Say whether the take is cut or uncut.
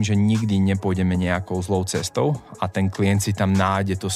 uncut